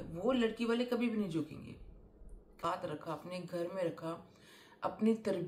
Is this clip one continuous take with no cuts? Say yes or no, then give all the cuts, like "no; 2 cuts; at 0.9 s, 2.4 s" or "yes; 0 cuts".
no; 1 cut; at 2.6 s